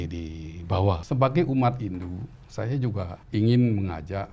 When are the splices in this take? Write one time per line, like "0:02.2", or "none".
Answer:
0:01.0
0:03.2